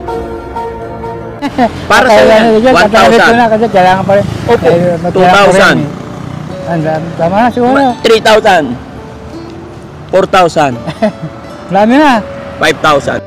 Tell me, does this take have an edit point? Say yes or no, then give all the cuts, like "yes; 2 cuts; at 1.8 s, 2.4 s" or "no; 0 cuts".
no; 0 cuts